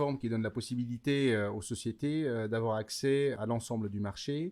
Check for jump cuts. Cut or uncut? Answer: uncut